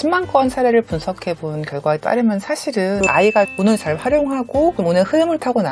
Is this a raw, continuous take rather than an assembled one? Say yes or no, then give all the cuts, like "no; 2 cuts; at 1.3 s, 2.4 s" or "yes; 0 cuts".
no; 1 cut; at 3.0 s